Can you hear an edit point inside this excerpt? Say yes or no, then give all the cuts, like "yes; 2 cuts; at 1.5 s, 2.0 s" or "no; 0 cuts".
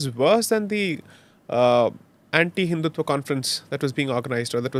no; 0 cuts